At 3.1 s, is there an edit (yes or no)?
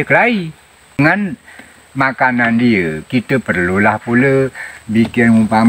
no